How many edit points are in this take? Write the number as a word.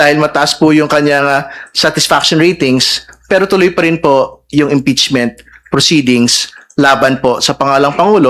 zero